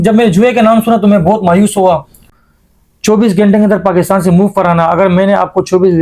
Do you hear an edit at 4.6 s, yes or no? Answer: no